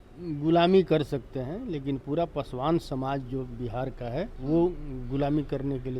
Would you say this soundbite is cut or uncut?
cut